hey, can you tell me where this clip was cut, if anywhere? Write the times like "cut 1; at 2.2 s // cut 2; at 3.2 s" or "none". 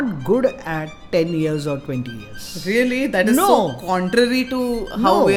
none